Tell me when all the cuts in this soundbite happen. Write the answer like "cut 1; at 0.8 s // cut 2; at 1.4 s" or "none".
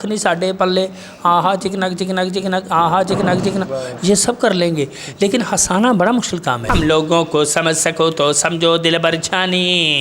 cut 1; at 6.6 s